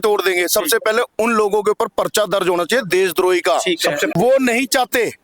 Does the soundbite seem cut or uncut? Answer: cut